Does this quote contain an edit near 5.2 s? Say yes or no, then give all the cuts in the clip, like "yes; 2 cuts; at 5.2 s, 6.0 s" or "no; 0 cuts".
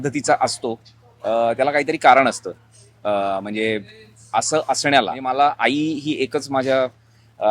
yes; 1 cut; at 5.2 s